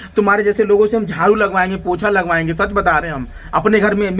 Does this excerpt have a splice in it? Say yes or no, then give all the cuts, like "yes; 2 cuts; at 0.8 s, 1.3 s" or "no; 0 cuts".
no; 0 cuts